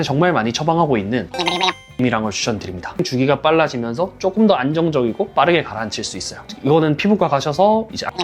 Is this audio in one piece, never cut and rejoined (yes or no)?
no